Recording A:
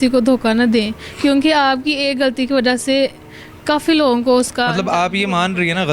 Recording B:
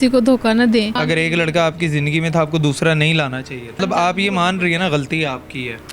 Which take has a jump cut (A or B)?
B